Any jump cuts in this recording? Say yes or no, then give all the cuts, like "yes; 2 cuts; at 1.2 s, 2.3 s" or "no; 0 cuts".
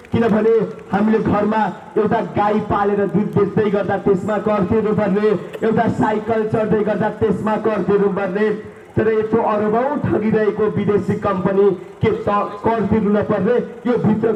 no; 0 cuts